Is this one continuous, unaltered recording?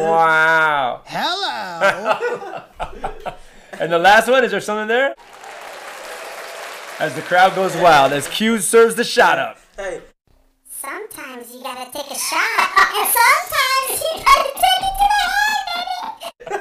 no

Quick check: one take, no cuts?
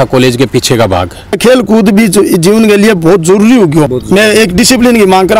no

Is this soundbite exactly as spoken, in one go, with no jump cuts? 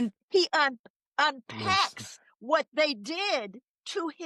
yes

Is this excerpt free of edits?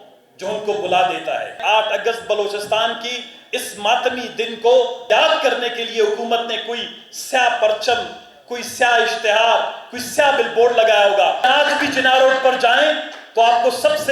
no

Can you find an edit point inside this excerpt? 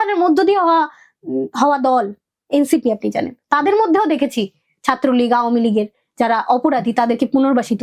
no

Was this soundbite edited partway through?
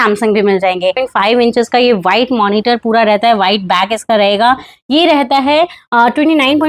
yes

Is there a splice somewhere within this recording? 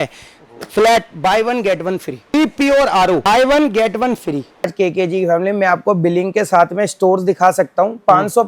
yes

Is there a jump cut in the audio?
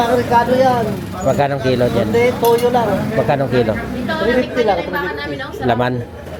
no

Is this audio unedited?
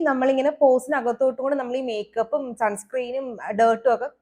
yes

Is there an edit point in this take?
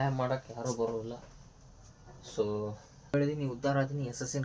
yes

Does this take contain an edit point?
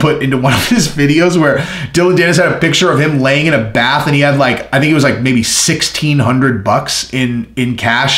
no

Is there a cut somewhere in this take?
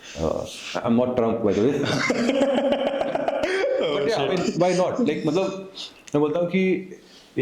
no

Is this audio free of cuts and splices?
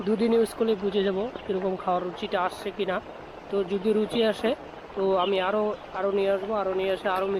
yes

